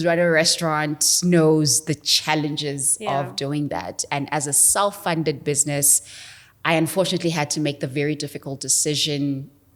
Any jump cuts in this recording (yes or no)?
no